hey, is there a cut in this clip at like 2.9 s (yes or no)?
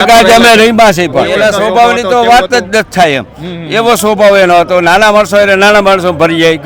no